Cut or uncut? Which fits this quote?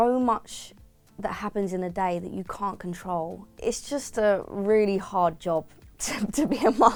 uncut